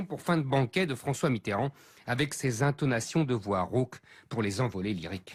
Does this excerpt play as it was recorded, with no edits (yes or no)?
yes